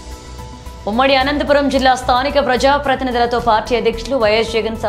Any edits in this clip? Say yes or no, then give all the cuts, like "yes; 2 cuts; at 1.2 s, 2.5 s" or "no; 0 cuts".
no; 0 cuts